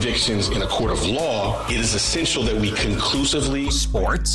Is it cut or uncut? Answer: uncut